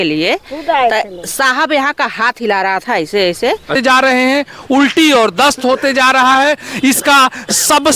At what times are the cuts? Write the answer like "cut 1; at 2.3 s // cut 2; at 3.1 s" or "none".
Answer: cut 1; at 3.8 s